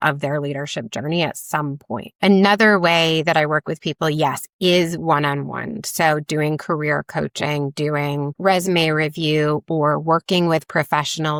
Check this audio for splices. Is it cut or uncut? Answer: uncut